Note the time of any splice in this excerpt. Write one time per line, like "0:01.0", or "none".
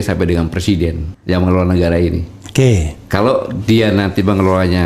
0:01.1

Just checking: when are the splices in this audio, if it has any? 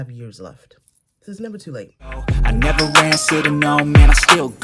0:02.0

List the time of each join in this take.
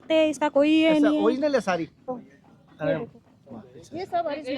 0:02.1

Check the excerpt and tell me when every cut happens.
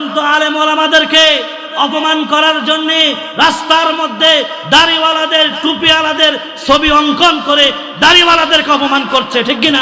none

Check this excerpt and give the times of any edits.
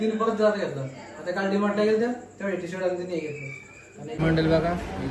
0:04.2

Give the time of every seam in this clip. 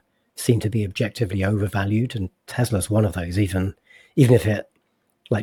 none

